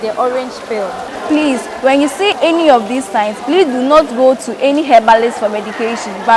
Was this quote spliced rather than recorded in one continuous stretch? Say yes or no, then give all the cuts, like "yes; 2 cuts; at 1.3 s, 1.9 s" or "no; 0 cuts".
yes; 2 cuts; at 1.1 s, 2.3 s